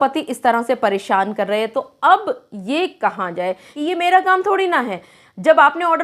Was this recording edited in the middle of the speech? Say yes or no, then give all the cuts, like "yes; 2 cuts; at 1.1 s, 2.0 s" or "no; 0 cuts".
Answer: yes; 1 cut; at 3.7 s